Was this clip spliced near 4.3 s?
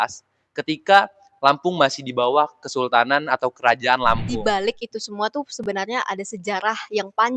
yes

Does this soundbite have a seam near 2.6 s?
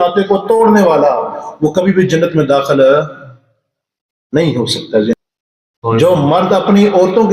no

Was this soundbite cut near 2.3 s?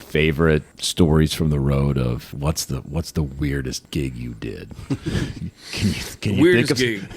yes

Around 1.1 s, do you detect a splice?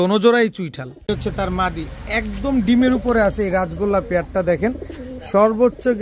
yes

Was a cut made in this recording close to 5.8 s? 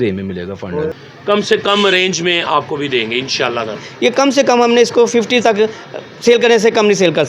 no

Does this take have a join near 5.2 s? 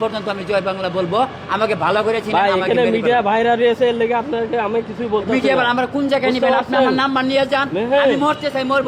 no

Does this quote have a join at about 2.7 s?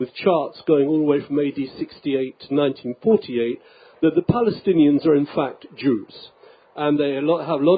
yes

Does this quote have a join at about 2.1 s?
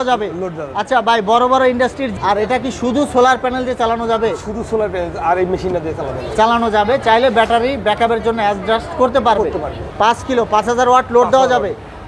yes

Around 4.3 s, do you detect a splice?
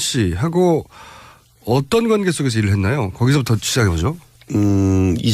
yes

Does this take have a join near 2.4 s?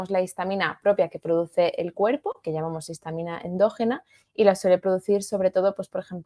yes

